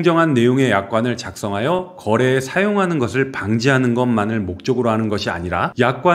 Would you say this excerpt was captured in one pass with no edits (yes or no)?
yes